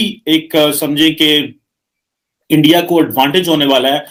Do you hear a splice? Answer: no; 0 cuts

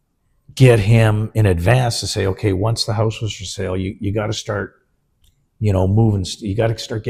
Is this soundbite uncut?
yes; 0 cuts

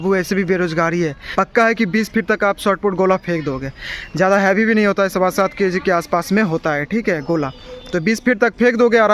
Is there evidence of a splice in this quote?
yes; 1 cut; at 1.2 s

